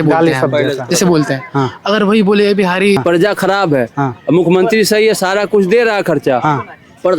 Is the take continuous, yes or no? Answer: no